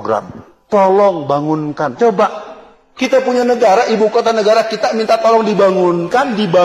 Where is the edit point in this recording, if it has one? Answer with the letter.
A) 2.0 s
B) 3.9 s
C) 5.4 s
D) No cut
D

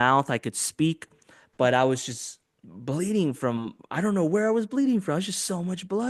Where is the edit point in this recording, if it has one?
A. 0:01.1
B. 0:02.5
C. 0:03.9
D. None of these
D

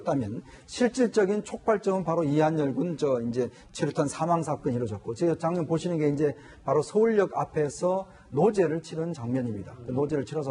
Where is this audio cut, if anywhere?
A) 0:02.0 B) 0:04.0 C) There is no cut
A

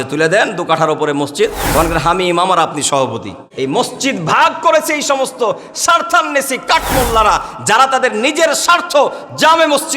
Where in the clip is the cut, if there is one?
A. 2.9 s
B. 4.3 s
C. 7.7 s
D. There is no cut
A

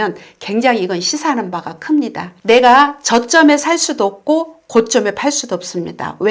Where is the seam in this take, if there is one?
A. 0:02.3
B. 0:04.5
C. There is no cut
A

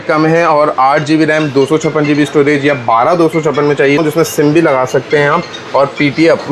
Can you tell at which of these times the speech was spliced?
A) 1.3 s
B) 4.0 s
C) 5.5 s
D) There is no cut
B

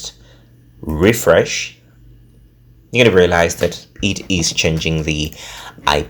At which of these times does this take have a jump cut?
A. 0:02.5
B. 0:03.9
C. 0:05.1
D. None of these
D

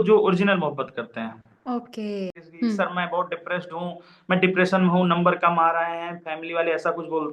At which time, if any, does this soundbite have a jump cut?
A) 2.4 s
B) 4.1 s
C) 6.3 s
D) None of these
A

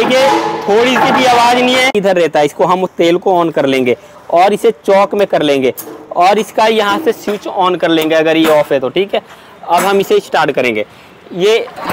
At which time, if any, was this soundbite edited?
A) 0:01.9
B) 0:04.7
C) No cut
A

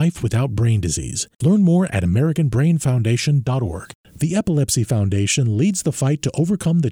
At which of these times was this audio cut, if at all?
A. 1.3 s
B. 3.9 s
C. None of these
B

